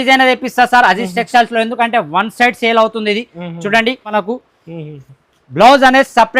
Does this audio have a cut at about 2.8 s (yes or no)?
no